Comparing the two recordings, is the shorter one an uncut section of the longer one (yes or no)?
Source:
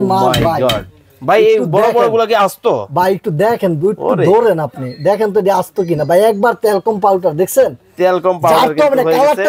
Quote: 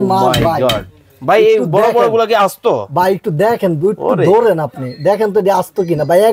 yes